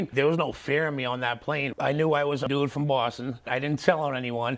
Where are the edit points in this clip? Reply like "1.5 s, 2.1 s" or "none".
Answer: 1.7 s